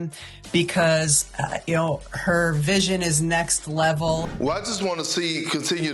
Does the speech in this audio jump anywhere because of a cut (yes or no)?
yes